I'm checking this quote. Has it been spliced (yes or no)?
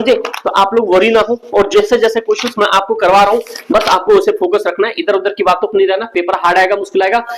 no